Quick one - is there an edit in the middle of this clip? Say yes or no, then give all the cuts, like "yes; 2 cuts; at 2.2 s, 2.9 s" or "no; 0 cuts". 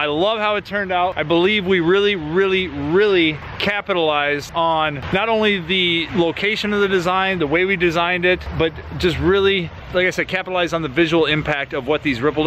no; 0 cuts